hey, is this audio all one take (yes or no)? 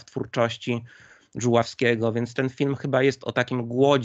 yes